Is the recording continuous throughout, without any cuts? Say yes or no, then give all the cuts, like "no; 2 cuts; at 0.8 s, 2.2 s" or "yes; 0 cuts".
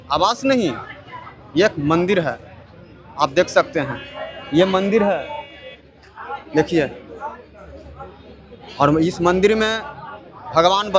yes; 0 cuts